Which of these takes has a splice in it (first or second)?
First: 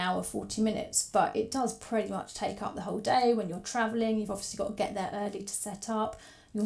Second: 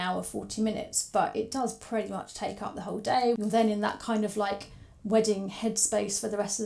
second